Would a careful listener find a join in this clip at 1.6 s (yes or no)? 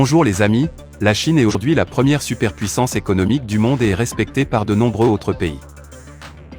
yes